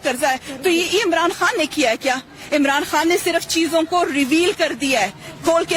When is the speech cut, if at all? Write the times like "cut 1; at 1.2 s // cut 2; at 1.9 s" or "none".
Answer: none